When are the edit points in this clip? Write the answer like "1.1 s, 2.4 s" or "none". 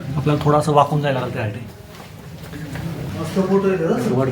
3.1 s